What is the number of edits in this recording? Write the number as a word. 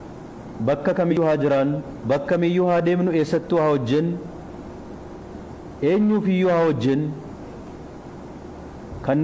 one